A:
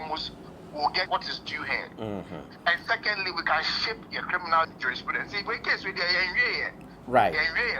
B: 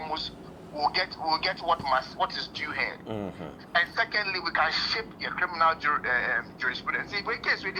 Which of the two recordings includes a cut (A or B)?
A